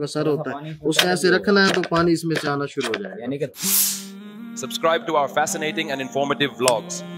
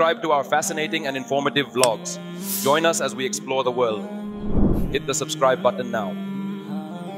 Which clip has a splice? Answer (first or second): first